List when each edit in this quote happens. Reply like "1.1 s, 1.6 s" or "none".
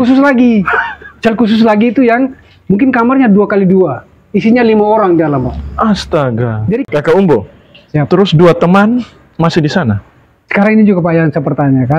6.8 s